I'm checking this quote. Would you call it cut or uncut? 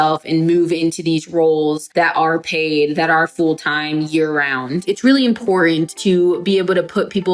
cut